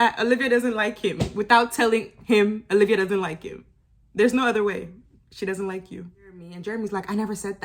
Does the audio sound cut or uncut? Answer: cut